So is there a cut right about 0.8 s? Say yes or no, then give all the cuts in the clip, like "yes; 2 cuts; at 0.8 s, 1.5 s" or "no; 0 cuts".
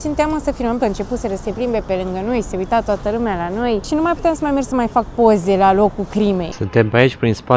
yes; 3 cuts; at 0.8 s, 3.9 s, 6.5 s